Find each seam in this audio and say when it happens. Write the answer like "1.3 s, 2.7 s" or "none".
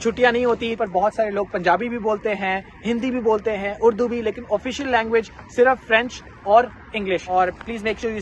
0.8 s, 7.3 s